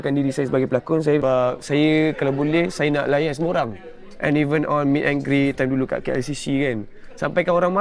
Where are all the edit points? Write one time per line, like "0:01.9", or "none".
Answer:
0:01.2

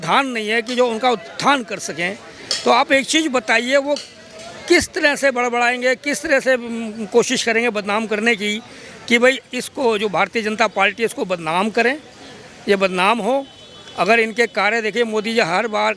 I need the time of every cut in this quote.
none

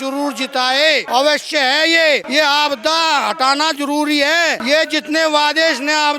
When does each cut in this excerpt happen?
0:01.0
0:02.3
0:04.6

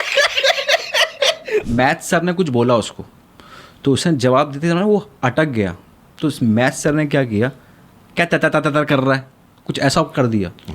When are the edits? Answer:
0:01.6

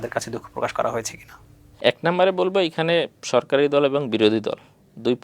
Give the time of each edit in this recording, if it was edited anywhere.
0:01.5

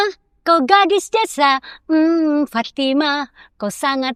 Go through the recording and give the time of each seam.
none

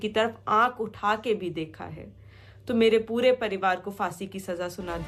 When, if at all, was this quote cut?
none

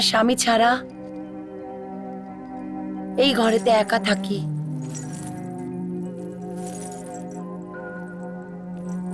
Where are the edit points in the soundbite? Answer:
none

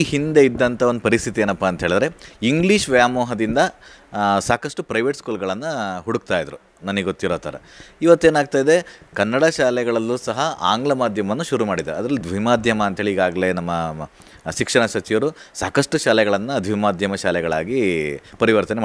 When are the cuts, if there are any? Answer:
none

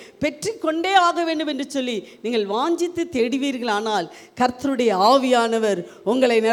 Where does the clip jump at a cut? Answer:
none

